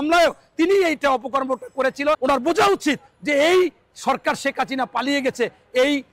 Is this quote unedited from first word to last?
no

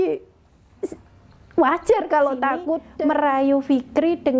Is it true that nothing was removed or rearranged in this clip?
no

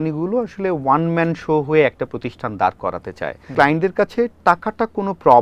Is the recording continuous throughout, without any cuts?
no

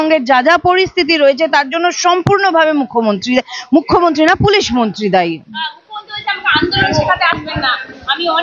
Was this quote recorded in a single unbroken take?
yes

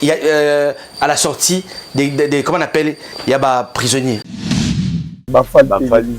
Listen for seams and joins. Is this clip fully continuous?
no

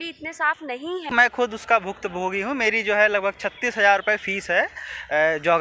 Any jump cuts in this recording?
yes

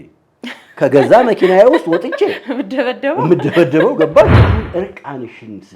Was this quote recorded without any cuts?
no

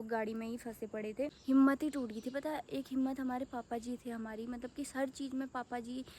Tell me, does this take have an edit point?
yes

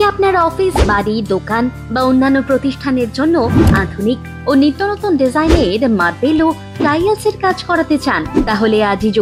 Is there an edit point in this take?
no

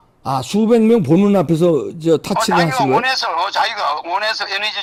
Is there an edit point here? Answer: no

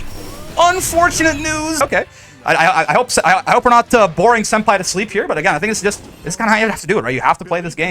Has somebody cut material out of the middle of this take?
yes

